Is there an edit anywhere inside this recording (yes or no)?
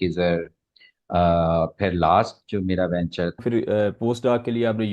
yes